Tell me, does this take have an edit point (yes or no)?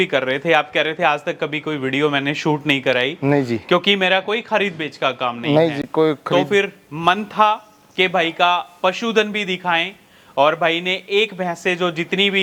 no